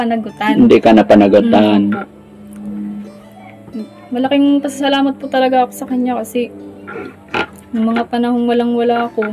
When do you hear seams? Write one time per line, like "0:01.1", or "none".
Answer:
none